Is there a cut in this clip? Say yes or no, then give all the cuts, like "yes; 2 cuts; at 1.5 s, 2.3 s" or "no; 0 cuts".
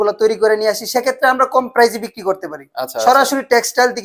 no; 0 cuts